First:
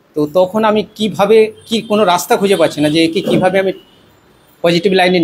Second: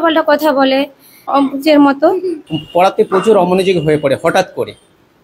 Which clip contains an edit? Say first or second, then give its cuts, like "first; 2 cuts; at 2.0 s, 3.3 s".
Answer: second; 2 cuts; at 1.2 s, 2.4 s